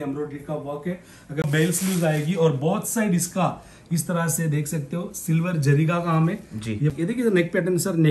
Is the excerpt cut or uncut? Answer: cut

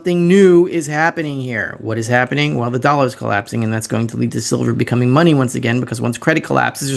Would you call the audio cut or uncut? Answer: uncut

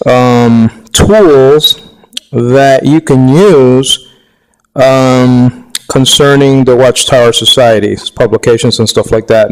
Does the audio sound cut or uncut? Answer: cut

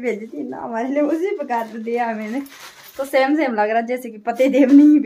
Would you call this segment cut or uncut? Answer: uncut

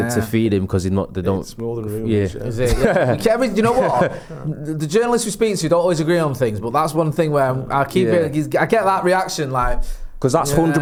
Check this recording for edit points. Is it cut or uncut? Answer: uncut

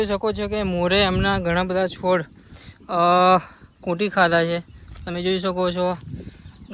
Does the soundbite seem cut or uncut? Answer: uncut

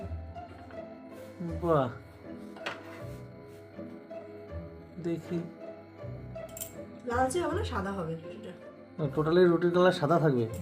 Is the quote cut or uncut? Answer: cut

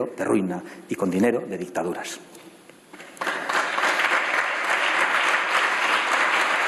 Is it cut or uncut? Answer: uncut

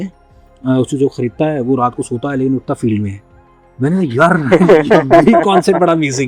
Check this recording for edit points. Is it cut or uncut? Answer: uncut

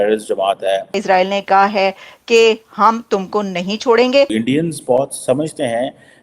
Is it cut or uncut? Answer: cut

